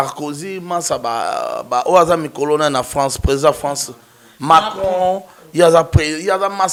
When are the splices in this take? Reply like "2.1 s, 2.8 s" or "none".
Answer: none